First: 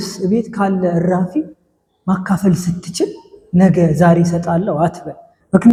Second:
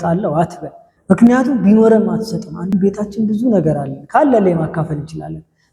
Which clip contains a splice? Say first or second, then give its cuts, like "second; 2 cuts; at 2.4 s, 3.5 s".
second; 1 cut; at 2.7 s